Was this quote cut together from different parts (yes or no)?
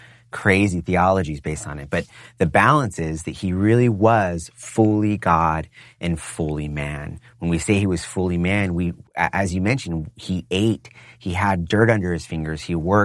no